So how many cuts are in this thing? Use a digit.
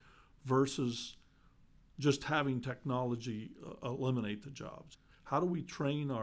1